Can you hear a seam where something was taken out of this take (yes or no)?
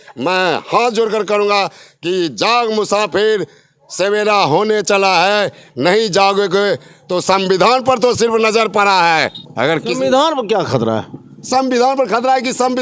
no